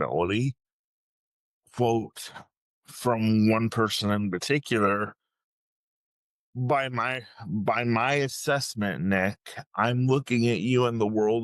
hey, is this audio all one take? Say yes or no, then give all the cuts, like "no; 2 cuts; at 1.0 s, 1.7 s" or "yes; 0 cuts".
yes; 0 cuts